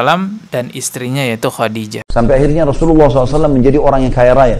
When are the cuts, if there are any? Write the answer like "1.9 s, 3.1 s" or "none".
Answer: 2.0 s